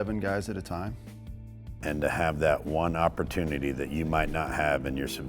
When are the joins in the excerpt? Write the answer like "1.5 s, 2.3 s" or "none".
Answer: 1.4 s